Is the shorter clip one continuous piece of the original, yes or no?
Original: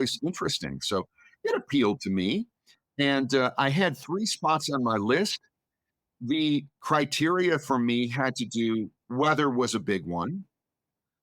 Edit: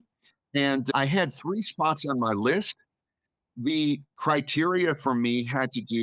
no